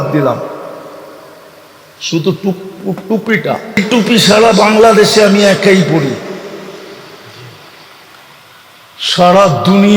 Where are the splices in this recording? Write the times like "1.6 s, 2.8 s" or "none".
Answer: 3.8 s